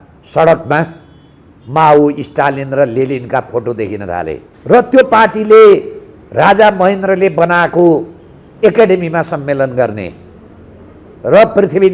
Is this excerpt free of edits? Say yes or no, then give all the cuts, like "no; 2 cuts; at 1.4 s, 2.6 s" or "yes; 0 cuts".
no; 1 cut; at 4.5 s